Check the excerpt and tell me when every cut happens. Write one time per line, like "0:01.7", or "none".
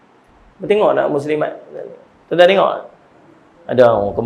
none

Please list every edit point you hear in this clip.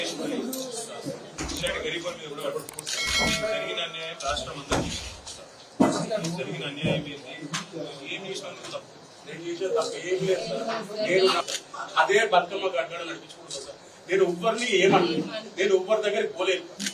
0:11.5

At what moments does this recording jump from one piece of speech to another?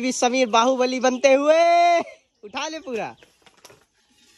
none

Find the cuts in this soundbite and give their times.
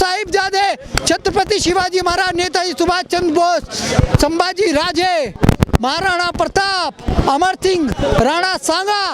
0:05.4

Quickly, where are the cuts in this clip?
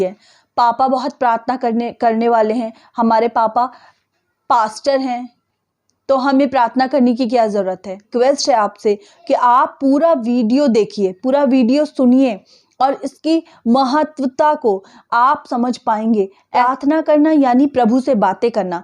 0:08.1
0:16.4

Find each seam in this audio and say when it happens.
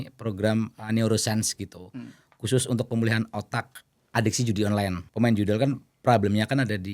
0:05.0

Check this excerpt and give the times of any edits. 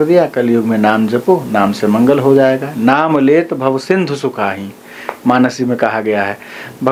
none

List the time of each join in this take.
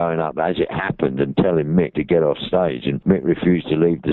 0:01.9

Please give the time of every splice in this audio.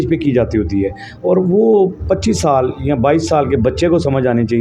none

